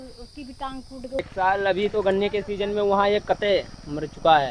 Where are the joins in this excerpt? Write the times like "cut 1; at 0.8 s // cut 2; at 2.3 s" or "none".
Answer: cut 1; at 1.2 s